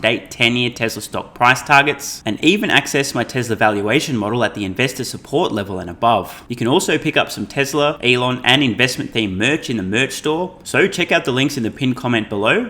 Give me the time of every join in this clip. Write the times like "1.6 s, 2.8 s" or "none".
6.4 s, 8.0 s, 10.6 s